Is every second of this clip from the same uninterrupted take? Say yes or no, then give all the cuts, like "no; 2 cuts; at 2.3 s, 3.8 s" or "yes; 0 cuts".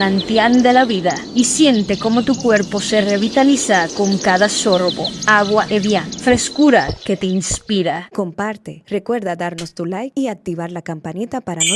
no; 1 cut; at 8.1 s